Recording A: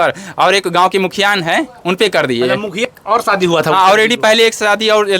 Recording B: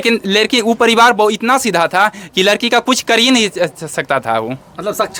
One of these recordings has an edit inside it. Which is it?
A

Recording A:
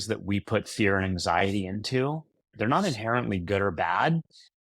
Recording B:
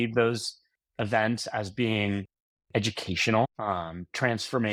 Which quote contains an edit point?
A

